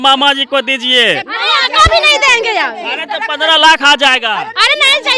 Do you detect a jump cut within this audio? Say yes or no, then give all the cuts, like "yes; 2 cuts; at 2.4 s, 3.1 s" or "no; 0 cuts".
no; 0 cuts